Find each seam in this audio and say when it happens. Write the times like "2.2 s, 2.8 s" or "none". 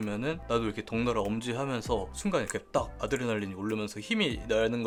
none